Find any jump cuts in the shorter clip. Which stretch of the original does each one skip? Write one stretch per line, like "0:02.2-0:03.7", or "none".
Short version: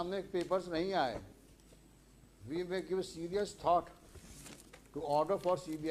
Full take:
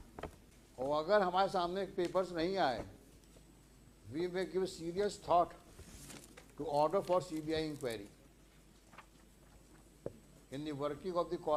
none